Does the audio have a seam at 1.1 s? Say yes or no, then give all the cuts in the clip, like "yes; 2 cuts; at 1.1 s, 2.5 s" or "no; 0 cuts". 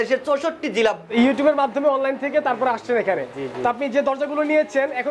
yes; 1 cut; at 1.1 s